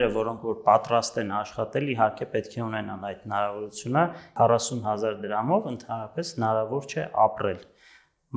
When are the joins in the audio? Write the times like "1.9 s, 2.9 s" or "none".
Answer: 4.2 s